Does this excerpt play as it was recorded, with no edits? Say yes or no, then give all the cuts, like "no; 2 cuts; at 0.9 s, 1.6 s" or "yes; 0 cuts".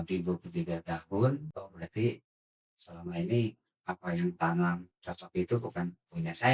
no; 1 cut; at 1.5 s